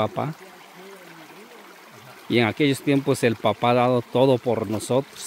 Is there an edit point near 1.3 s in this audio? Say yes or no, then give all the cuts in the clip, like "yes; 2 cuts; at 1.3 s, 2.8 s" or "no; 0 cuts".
no; 0 cuts